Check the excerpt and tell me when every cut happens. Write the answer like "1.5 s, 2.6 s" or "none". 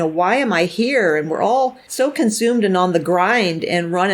1.8 s